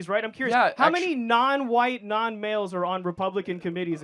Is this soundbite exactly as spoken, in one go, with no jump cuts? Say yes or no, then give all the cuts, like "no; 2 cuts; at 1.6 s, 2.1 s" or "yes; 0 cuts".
yes; 0 cuts